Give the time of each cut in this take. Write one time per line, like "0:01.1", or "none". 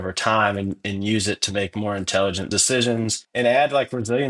0:02.9